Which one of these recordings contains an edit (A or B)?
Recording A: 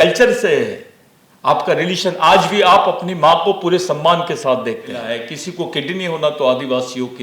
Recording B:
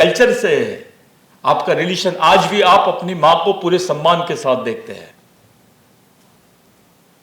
A